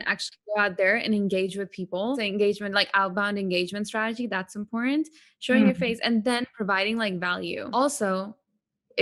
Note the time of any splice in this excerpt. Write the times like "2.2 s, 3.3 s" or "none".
2.2 s, 7.6 s